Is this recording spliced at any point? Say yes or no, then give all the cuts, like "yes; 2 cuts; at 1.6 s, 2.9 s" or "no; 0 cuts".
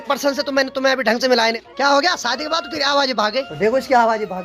yes; 2 cuts; at 1.5 s, 3.5 s